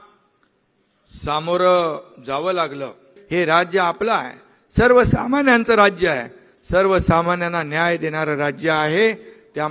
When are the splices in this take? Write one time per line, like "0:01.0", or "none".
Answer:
0:03.1